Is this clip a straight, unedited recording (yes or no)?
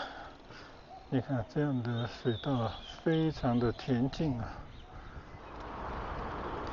no